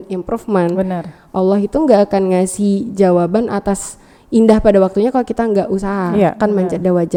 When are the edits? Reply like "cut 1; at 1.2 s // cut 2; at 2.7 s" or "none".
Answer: none